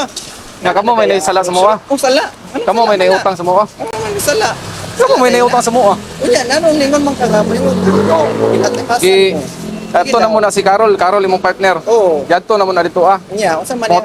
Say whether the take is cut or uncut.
uncut